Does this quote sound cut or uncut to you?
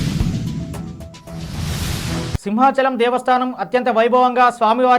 cut